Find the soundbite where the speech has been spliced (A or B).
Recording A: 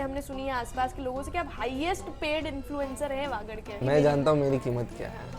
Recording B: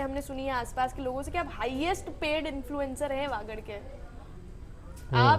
A